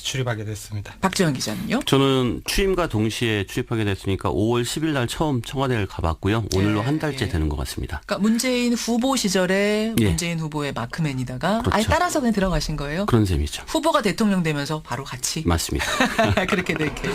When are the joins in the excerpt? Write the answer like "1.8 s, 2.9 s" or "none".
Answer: 6.2 s